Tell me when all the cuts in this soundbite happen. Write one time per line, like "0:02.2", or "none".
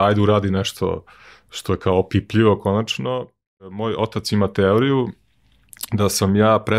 0:03.7